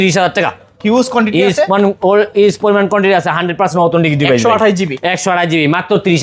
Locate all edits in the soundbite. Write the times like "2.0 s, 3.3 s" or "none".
none